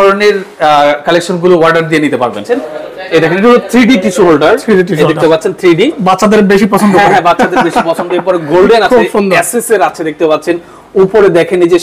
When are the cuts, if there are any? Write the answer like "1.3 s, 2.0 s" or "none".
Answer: 2.4 s